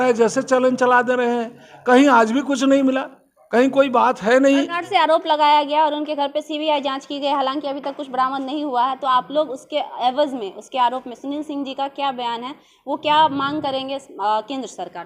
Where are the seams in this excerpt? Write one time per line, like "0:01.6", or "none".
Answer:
0:04.8